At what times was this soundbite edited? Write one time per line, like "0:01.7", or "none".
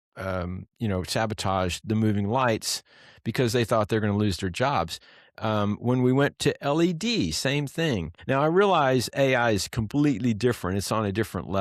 0:08.1

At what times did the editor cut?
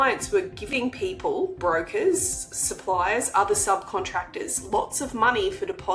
none

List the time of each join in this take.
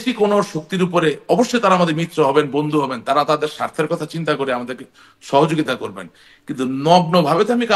none

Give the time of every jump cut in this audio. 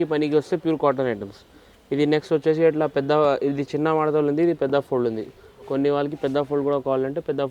none

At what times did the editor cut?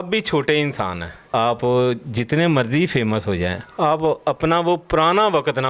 0:01.3

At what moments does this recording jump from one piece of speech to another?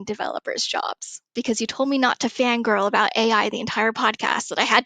0:01.4

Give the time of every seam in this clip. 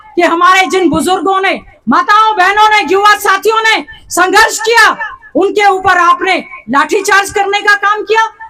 none

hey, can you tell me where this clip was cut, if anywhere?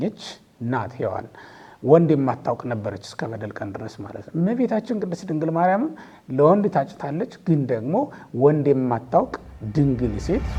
none

